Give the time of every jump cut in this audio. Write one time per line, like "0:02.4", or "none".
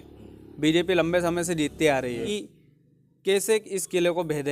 0:02.3